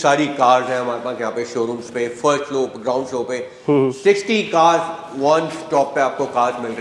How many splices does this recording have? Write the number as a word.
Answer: zero